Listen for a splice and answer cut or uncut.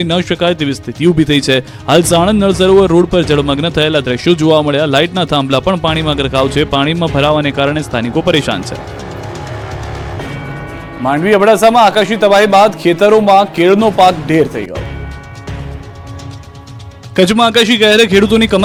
uncut